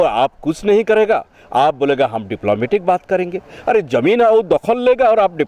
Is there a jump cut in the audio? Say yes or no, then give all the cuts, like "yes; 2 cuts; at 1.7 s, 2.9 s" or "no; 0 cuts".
no; 0 cuts